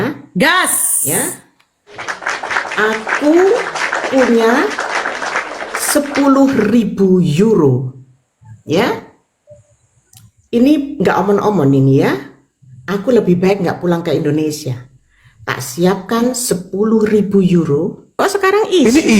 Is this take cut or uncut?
cut